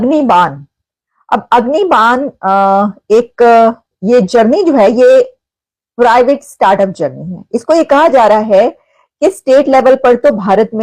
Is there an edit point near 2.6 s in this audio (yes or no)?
no